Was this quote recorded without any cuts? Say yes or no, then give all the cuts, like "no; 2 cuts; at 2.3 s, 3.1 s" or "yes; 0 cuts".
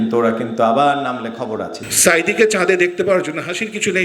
no; 1 cut; at 1.8 s